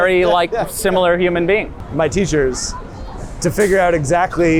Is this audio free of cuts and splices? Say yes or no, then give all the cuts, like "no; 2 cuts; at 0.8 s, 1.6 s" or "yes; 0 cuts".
no; 1 cut; at 1.8 s